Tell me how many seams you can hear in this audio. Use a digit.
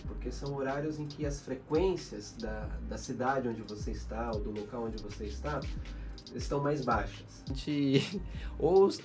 1